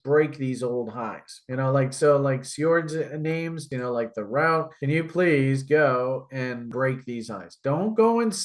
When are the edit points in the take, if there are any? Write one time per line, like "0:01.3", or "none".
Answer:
0:03.6
0:06.7